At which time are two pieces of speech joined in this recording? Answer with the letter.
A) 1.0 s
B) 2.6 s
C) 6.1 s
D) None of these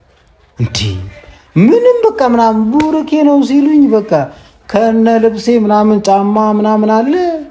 D